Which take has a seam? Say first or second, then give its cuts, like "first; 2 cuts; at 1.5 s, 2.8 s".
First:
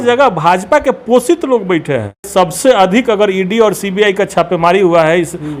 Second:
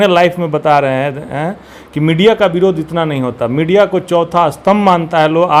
first; 1 cut; at 2.3 s